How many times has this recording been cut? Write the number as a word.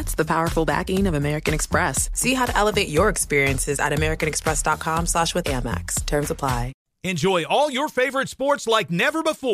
one